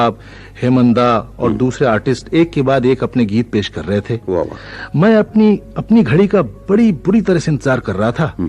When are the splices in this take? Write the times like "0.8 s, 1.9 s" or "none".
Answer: none